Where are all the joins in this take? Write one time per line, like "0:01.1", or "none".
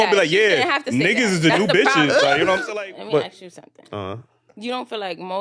0:02.7